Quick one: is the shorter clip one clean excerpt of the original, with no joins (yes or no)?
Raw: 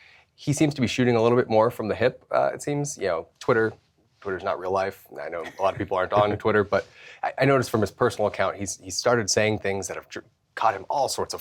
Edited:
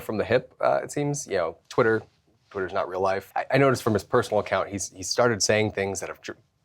no